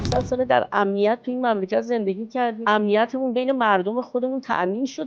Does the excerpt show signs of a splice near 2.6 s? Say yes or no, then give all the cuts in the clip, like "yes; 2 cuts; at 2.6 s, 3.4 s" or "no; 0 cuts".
yes; 1 cut; at 2.6 s